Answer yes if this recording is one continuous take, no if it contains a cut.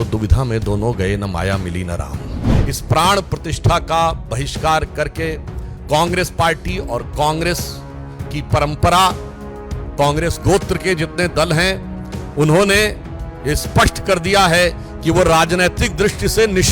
no